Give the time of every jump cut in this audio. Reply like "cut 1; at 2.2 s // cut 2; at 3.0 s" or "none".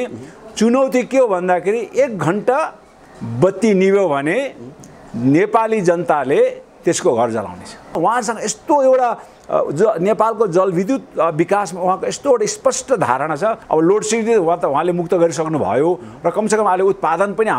cut 1; at 8.0 s // cut 2; at 13.6 s